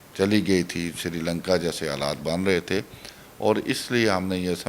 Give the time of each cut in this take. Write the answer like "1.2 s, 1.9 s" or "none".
none